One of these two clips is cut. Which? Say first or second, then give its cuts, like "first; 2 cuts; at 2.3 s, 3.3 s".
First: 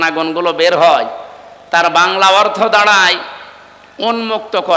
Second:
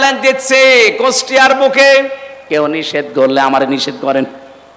second; 1 cut; at 2.4 s